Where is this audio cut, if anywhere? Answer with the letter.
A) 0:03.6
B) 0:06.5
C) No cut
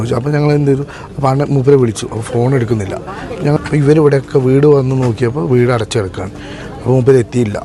A